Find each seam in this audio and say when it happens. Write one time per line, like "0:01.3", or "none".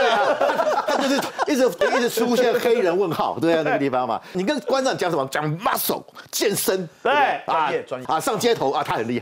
0:01.8
0:04.3
0:08.0